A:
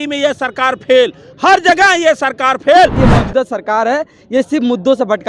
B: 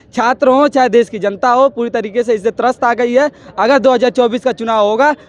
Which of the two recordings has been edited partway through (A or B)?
A